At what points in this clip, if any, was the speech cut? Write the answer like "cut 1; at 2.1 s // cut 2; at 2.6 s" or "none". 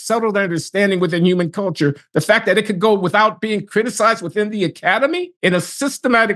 cut 1; at 5.3 s